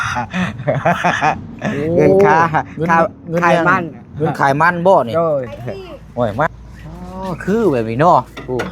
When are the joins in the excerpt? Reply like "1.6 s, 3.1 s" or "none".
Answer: 6.5 s